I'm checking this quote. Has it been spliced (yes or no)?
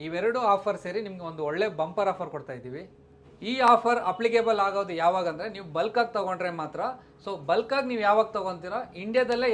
no